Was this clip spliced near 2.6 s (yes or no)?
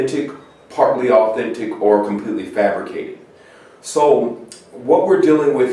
yes